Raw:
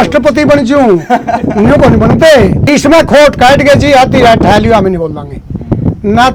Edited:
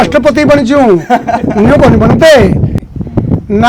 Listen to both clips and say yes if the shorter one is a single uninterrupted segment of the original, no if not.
no